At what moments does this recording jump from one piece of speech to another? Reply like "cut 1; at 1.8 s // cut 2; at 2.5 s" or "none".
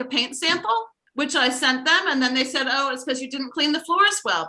cut 1; at 1.0 s